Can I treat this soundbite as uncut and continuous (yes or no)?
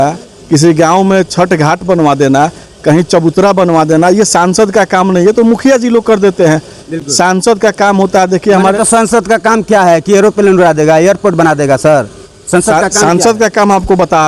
yes